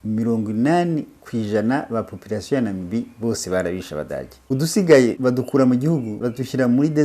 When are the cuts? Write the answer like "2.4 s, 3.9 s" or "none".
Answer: 4.3 s, 5.2 s, 6.2 s